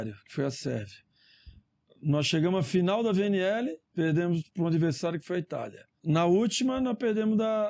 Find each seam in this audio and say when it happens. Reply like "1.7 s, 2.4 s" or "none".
3.8 s, 5.9 s